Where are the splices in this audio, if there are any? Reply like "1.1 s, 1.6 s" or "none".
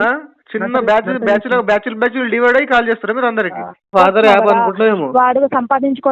3.9 s